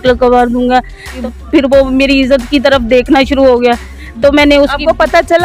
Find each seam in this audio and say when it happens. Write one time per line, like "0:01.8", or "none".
0:01.2